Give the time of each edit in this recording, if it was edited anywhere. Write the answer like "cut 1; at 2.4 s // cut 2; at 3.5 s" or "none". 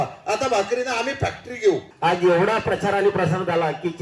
cut 1; at 1.9 s

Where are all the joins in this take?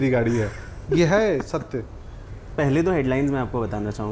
cut 1; at 2.5 s

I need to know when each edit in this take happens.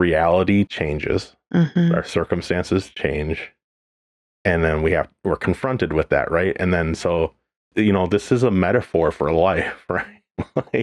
cut 1; at 7.6 s

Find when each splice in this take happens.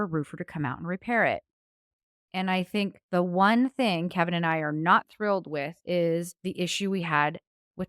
cut 1; at 2.4 s // cut 2; at 5.8 s // cut 3; at 6.4 s

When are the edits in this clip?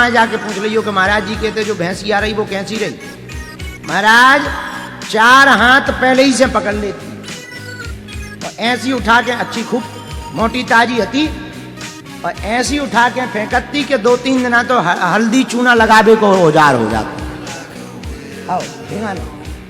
none

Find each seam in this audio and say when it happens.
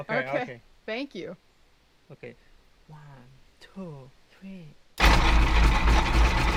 none

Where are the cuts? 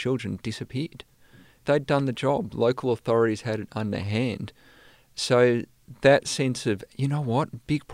cut 1; at 1.6 s

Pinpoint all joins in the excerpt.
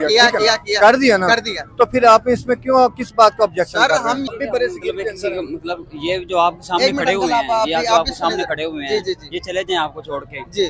cut 1; at 4.3 s

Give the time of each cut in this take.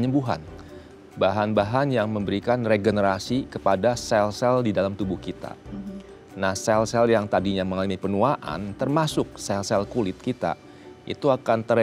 none

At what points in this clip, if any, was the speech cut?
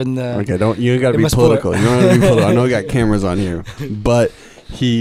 none

